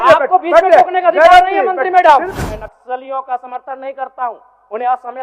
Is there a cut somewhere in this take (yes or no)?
yes